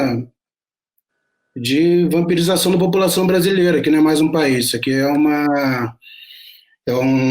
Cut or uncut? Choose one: cut